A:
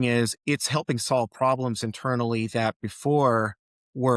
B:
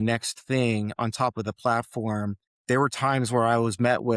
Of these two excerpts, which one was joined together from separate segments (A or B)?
B